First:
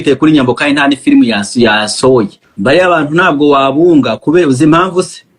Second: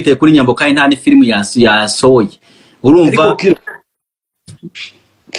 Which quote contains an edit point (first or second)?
first